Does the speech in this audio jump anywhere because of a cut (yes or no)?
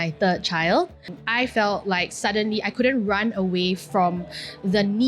yes